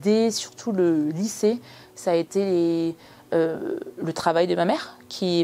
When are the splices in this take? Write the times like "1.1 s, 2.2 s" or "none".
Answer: none